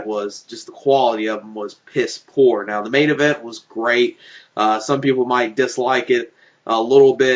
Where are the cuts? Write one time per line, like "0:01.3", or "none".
0:04.8